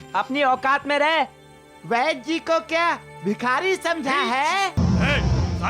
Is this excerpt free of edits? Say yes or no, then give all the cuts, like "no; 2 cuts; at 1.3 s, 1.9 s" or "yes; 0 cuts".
no; 1 cut; at 4.8 s